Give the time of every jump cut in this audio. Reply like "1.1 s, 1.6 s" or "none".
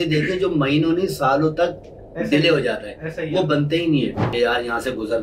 4.2 s